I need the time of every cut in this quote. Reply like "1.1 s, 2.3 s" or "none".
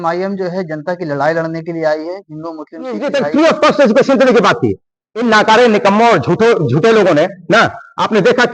3.0 s

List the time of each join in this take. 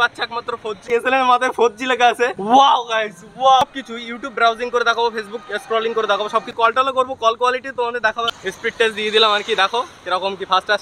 0.8 s, 2.4 s, 3.6 s, 6.5 s, 8.4 s

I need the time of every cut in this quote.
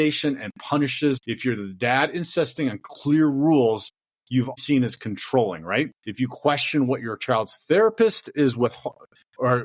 1.3 s, 4.6 s, 6.0 s

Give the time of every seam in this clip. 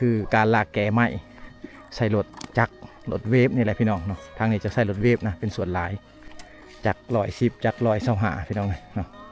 none

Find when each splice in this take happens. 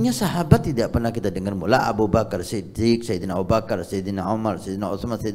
none

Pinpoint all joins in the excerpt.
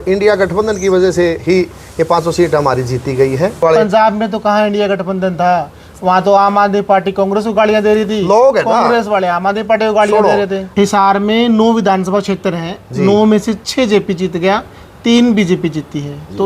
3.6 s, 10.7 s

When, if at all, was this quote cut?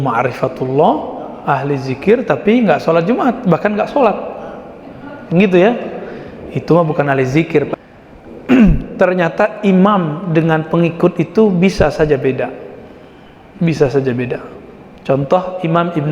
7.7 s

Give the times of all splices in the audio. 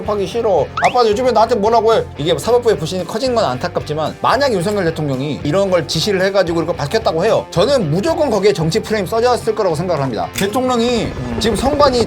2.1 s

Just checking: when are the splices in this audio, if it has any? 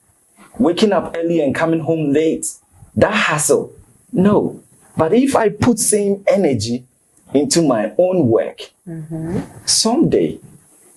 none

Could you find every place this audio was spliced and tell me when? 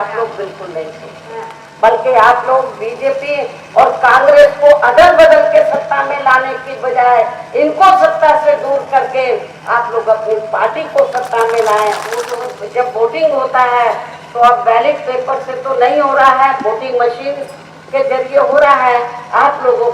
1.6 s, 12.3 s

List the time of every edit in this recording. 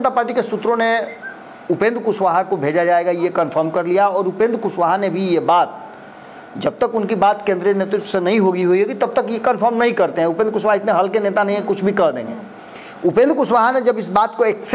none

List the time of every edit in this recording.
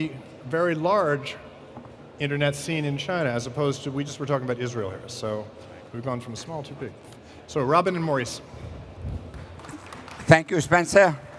7.2 s

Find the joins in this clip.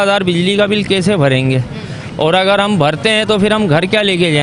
none

